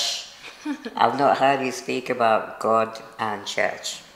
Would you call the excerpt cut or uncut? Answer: uncut